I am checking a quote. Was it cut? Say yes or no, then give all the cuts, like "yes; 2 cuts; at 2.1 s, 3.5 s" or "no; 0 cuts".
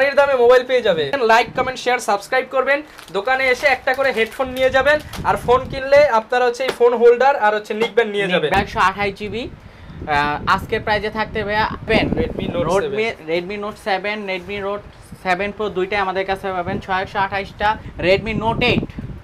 yes; 4 cuts; at 1.2 s, 8.5 s, 11.9 s, 17.9 s